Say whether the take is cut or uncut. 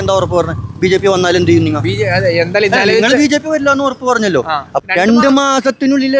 cut